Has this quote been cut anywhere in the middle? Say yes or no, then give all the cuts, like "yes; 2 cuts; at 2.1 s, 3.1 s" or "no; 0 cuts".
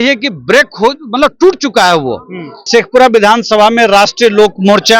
yes; 1 cut; at 2.7 s